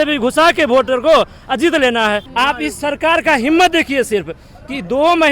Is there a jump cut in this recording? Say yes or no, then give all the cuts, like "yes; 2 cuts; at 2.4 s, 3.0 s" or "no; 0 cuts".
yes; 1 cut; at 2.3 s